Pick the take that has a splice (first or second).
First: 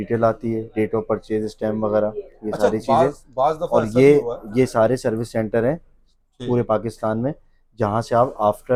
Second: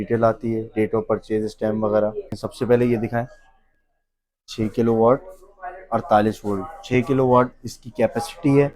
second